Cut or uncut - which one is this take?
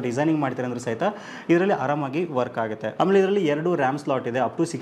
cut